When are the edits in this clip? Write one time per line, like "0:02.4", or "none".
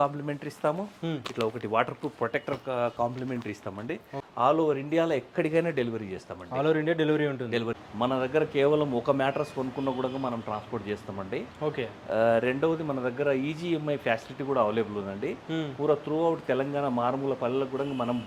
0:04.2
0:07.8